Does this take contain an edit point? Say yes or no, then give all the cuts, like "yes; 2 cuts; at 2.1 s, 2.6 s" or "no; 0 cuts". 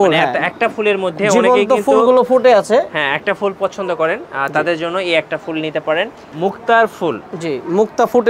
yes; 1 cut; at 6.2 s